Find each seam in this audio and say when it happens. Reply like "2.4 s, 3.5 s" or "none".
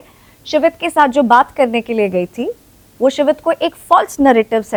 none